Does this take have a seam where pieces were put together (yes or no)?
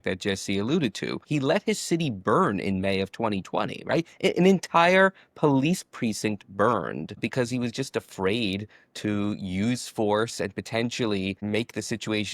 yes